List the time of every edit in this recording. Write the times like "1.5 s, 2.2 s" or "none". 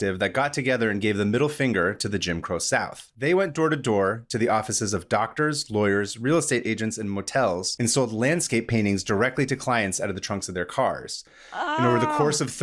3.0 s, 7.7 s